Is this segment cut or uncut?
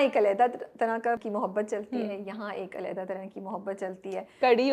cut